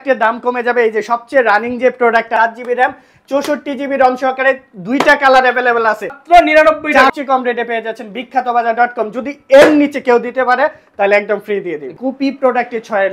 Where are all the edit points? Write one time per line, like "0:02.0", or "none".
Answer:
0:02.3
0:06.2
0:07.1
0:11.9